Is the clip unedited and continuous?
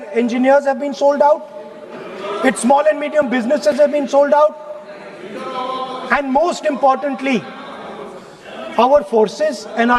yes; 0 cuts

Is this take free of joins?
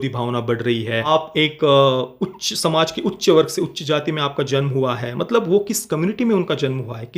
no; 1 cut; at 1.1 s

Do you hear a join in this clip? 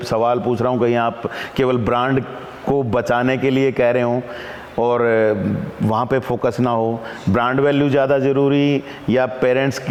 no; 0 cuts

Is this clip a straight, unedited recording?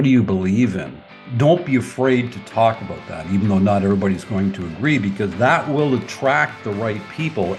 no; 1 cut; at 1.3 s

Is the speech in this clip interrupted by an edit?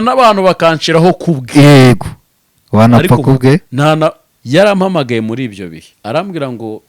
yes; 2 cuts; at 4.3 s, 5.8 s

